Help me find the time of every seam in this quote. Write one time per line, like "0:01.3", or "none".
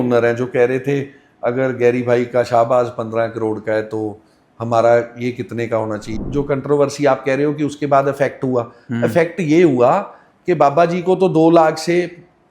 0:06.1